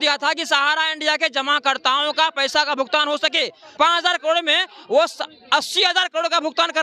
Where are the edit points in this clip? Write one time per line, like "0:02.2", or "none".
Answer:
0:03.6